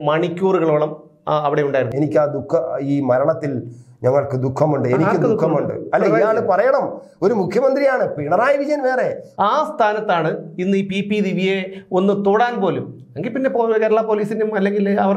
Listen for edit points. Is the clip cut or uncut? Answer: cut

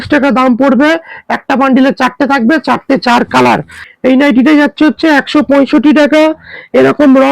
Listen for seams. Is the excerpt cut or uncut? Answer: cut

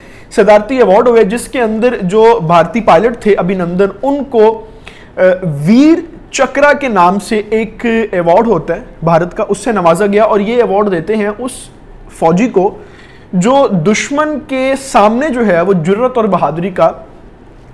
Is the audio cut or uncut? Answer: uncut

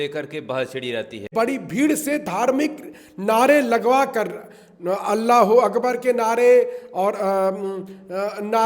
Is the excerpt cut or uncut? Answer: cut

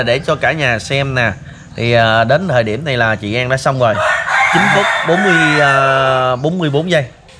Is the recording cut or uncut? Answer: uncut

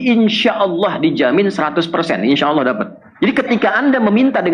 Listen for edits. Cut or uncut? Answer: cut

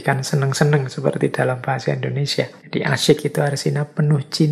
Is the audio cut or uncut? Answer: cut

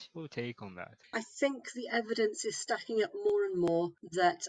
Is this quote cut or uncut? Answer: cut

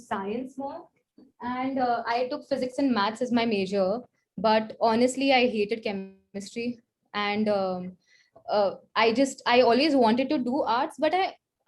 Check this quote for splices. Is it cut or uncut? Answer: uncut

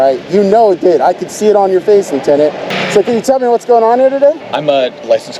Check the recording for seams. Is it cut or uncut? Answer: cut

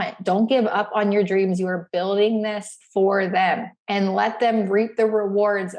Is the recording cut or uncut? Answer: cut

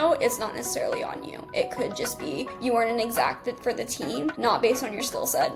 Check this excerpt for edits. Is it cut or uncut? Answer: uncut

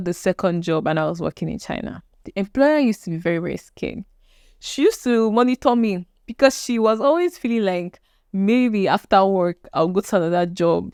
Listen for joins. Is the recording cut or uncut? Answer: uncut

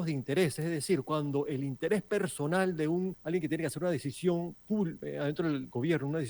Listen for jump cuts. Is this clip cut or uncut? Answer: cut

